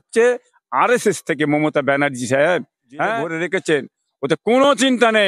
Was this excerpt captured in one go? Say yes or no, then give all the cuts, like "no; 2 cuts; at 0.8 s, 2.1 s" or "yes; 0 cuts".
no; 1 cut; at 3.3 s